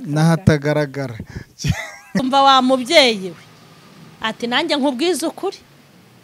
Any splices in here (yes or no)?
yes